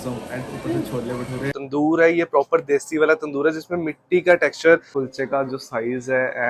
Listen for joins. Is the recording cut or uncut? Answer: cut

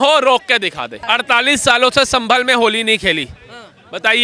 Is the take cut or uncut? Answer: cut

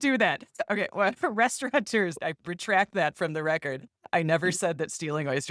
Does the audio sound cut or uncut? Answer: uncut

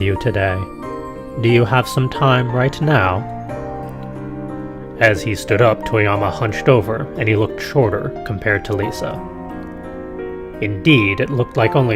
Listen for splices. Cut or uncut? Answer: cut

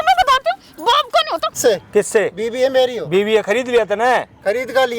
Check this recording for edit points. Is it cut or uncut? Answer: cut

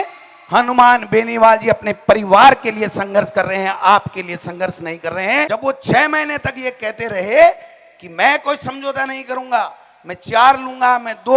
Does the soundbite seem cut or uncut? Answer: cut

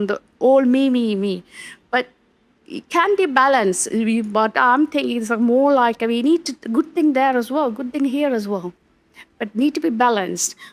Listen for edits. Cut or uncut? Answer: uncut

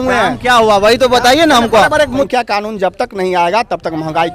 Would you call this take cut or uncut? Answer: cut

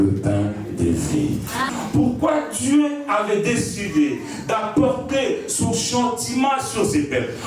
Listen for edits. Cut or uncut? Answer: cut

